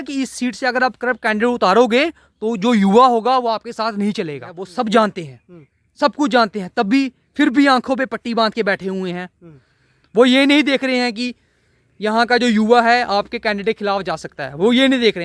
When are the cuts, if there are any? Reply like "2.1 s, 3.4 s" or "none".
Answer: 4.6 s